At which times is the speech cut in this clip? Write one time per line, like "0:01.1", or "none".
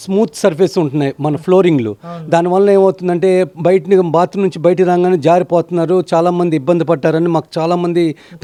none